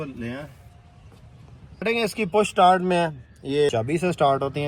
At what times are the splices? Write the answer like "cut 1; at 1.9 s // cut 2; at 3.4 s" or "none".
cut 1; at 1.8 s // cut 2; at 3.7 s